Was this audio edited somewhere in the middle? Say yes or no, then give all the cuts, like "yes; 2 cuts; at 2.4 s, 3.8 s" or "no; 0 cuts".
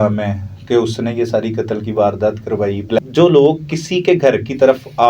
yes; 1 cut; at 3.0 s